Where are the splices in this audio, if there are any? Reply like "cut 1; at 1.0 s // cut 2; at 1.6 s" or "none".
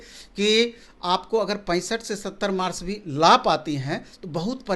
none